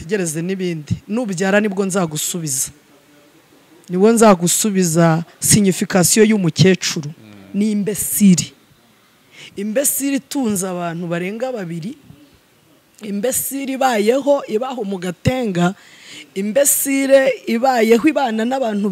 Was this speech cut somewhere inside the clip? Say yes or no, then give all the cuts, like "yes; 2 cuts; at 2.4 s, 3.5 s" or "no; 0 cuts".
no; 0 cuts